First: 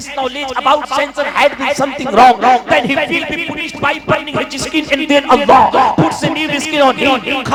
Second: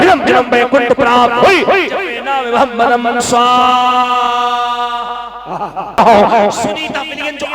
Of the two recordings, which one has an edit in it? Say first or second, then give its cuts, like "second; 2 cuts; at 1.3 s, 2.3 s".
second; 1 cut; at 6.0 s